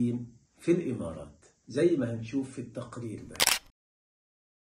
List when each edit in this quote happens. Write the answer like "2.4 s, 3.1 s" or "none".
none

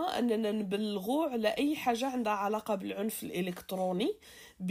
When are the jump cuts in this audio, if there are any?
none

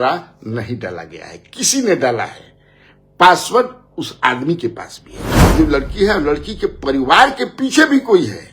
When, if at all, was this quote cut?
5.4 s

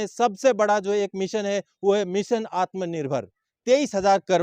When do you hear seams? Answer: 3.5 s

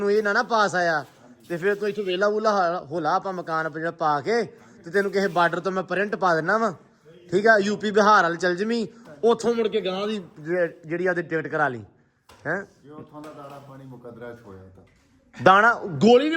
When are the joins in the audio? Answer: none

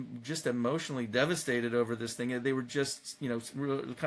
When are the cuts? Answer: none

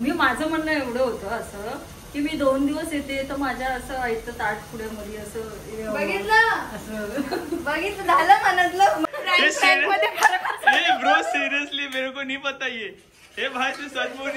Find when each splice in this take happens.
6.8 s, 9.0 s

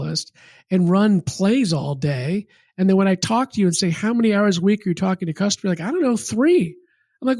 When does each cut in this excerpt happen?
none

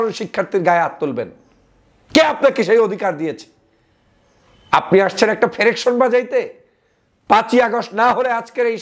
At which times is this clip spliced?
none

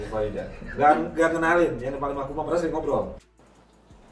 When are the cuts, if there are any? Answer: none

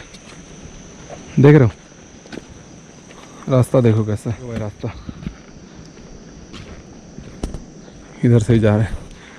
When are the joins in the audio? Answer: 4.7 s

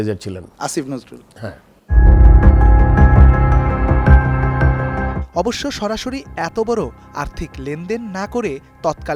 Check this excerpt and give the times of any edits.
none

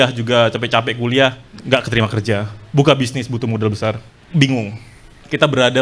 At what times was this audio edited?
1.5 s, 4.1 s

